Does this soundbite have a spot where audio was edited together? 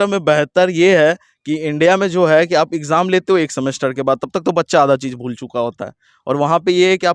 no; 0 cuts

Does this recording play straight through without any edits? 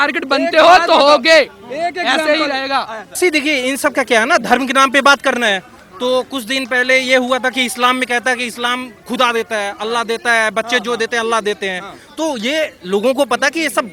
no; 1 cut; at 3.2 s

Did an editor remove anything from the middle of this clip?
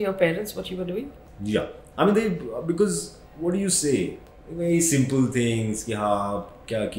no; 0 cuts

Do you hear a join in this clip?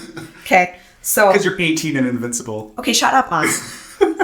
no; 0 cuts

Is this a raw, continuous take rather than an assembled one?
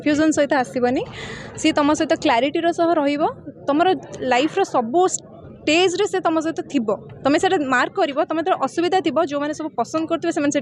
yes; 0 cuts

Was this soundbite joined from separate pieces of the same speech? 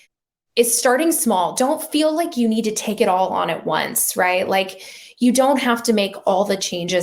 no; 0 cuts

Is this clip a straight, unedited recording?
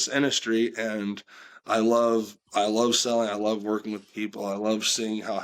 yes; 0 cuts

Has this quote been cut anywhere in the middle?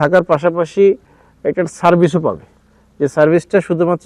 no; 0 cuts

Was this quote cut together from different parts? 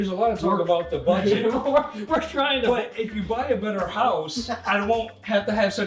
no; 0 cuts

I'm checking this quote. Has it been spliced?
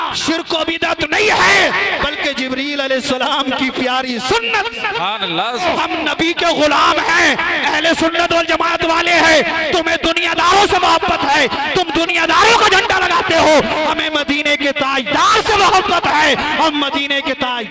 yes; 1 cut; at 5.6 s

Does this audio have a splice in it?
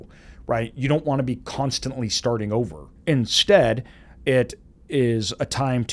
yes; 1 cut; at 2.9 s

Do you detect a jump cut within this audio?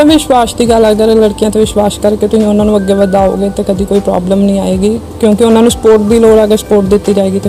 no; 0 cuts

